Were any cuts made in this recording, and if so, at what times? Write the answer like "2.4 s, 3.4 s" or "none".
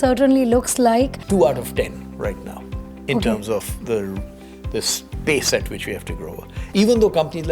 1.2 s, 6.6 s